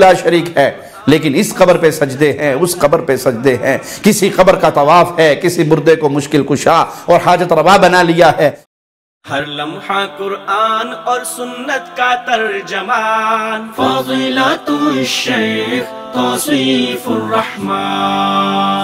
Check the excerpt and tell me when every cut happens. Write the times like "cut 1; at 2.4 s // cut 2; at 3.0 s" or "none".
cut 1; at 8.6 s